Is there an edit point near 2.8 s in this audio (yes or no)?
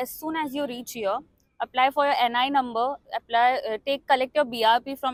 no